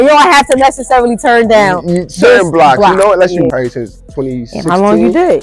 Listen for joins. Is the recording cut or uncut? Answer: cut